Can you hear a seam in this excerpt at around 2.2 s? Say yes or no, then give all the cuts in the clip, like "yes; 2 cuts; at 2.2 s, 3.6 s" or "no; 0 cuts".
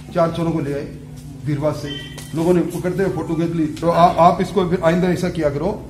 no; 1 cut; at 3.8 s